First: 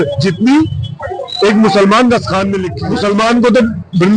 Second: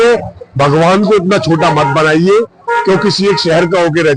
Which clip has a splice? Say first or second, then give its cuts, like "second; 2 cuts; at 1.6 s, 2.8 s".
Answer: first; 1 cut; at 2.7 s